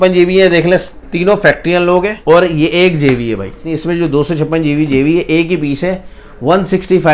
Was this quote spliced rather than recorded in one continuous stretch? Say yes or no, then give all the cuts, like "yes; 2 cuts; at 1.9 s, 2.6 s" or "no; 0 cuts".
yes; 2 cuts; at 2.2 s, 3.7 s